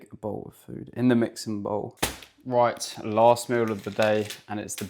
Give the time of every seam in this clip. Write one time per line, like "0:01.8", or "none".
0:02.0